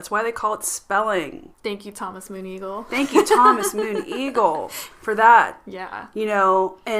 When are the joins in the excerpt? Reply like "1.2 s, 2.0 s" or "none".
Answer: 1.5 s